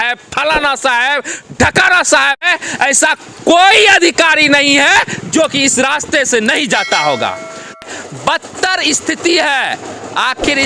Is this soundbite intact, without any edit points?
no; 2 cuts; at 2.4 s, 7.8 s

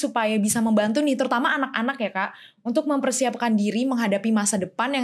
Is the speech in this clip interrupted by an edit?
no; 0 cuts

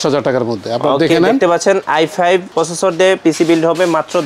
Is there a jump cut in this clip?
yes; 1 cut; at 2.2 s

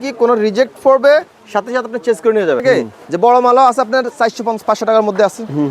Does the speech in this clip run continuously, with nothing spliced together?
no; 1 cut; at 2.6 s

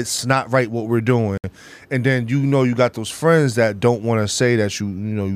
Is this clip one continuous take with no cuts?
yes; 0 cuts

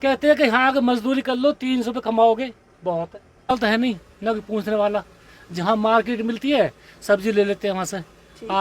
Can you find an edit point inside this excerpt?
yes; 1 cut; at 3.5 s

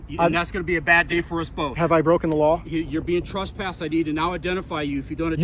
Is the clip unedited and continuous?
yes; 0 cuts

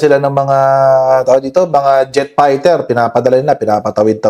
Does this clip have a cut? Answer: no; 0 cuts

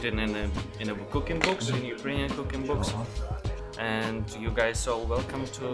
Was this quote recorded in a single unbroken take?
yes; 0 cuts

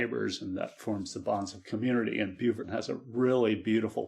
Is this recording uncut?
no; 1 cut; at 2.6 s

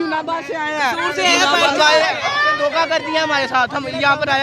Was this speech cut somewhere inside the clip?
no; 0 cuts

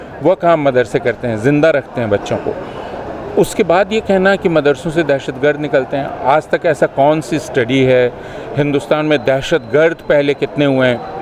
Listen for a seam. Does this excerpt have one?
no; 0 cuts

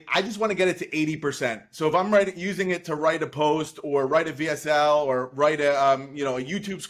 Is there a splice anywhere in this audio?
no; 0 cuts

